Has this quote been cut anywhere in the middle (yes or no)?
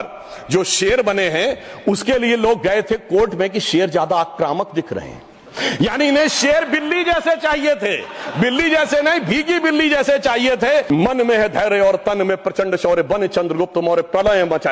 yes